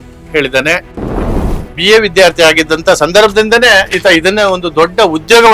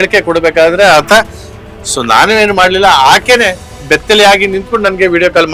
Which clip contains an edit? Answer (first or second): first